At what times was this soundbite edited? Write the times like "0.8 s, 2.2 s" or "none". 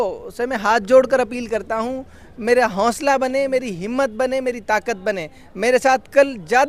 none